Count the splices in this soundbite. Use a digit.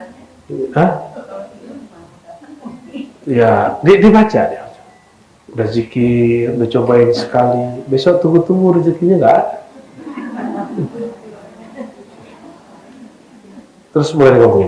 0